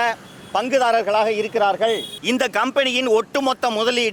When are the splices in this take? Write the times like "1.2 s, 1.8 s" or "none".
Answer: 2.1 s

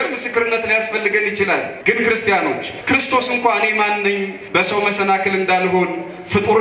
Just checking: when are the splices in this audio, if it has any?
1.7 s, 2.7 s, 4.4 s

